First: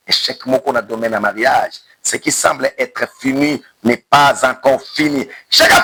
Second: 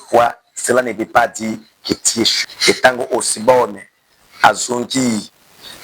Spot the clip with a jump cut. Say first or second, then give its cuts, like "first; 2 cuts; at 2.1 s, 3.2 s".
second; 1 cut; at 2.4 s